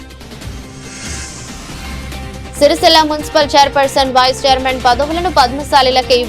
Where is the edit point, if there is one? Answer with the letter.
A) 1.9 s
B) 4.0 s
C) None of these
A